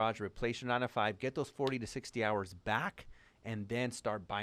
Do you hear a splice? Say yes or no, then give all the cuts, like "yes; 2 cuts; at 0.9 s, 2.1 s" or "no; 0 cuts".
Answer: no; 0 cuts